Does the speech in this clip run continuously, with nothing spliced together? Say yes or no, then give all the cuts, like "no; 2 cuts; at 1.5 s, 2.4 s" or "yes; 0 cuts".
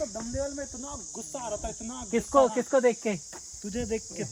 yes; 0 cuts